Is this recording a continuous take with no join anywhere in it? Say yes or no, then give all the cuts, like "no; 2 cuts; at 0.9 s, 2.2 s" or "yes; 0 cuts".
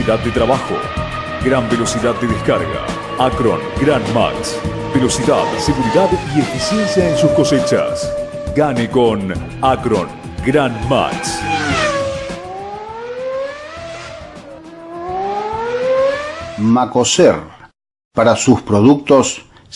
no; 1 cut; at 16.4 s